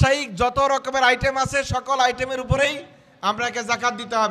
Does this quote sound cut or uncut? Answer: uncut